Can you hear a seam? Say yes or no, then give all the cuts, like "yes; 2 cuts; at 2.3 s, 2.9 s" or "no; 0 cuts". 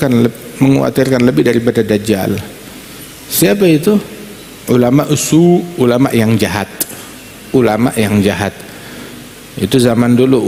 no; 0 cuts